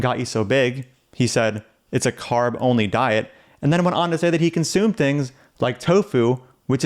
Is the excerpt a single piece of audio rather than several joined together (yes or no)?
yes